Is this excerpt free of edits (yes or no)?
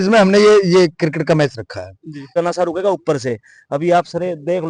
no